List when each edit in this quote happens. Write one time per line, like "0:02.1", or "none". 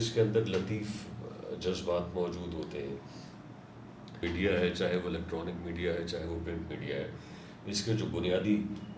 0:04.2